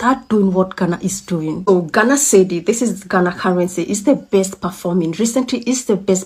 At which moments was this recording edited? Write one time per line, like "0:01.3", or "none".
none